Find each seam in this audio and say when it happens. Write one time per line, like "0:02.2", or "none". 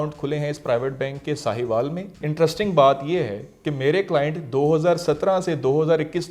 0:02.2